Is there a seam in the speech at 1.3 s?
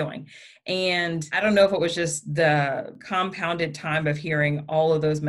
yes; 2 cuts; at 1.3 s, 3.0 s

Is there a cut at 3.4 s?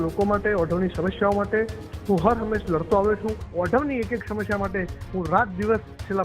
yes; 1 cut; at 3.4 s

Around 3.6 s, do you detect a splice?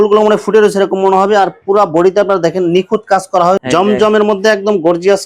yes; 1 cut; at 3.6 s

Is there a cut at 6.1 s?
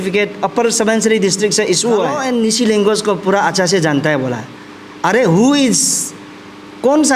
no; 1 cut; at 2.2 s

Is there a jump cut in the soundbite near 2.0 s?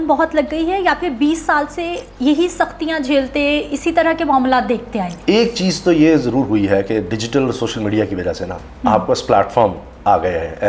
yes; 2 cuts; at 2.0 s, 5.1 s

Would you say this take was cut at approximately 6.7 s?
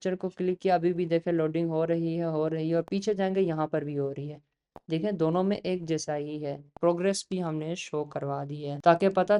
yes; 1 cut; at 6.7 s

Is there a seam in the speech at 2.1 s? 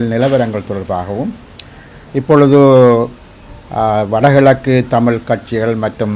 no; 0 cuts

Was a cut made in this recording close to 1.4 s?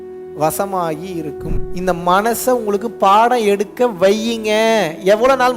yes; 1 cut; at 1.4 s

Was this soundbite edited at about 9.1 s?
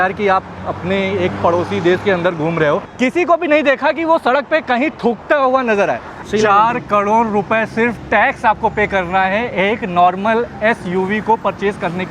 no; 2 cuts; at 2.9 s, 6.1 s

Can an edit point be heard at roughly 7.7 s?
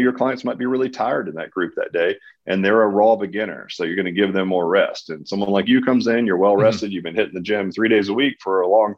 no; 0 cuts

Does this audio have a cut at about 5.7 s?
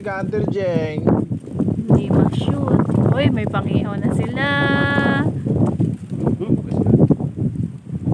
no; 0 cuts

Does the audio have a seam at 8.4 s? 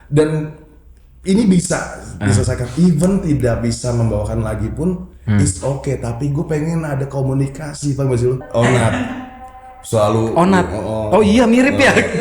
yes; 1 cut; at 8.4 s

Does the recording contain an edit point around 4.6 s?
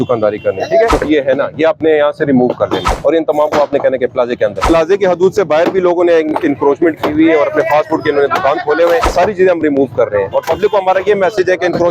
yes; 4 cuts; at 0.9 s, 2.9 s, 4.6 s, 9.1 s

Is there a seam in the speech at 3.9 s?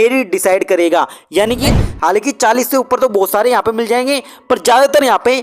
no; 1 cut; at 1.7 s

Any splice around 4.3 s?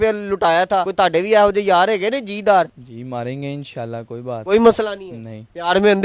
yes; 3 cuts; at 0.9 s, 2.8 s, 4.3 s

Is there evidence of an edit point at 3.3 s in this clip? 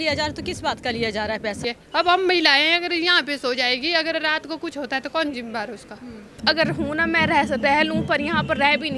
no; 2 cuts; at 1.6 s, 6.3 s

